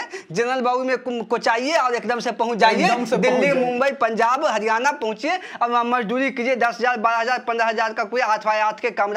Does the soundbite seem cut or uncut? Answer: uncut